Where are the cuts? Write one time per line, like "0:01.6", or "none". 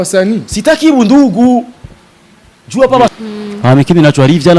0:03.1